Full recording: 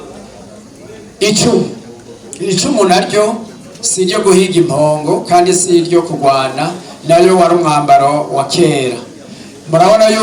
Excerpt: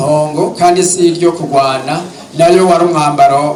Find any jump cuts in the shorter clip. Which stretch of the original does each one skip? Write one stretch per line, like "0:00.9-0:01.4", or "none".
none